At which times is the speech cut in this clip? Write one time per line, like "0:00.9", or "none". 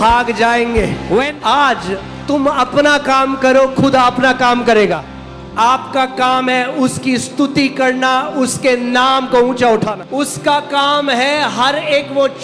0:01.3
0:05.1
0:09.9